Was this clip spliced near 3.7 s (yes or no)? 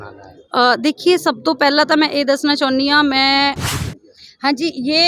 yes